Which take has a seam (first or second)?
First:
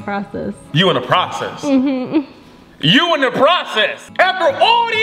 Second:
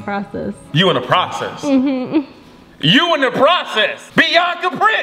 first